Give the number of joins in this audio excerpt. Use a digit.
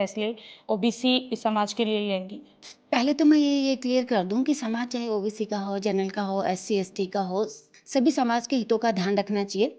1